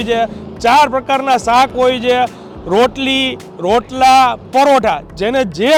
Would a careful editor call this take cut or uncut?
uncut